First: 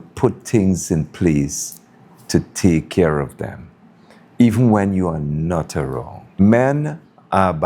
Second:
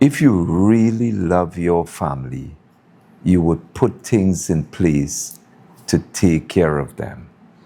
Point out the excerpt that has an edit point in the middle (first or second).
first